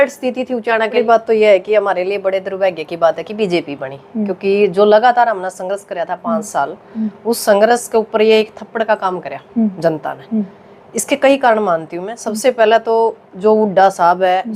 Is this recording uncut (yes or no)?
no